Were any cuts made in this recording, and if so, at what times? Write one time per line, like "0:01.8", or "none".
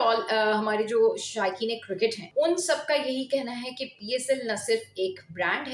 0:02.2